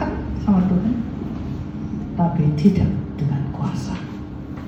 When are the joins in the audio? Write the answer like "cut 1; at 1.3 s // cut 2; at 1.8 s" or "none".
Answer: none